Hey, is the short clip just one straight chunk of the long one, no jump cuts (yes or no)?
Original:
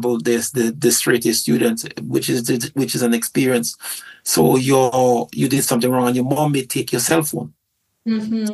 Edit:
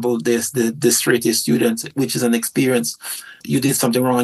no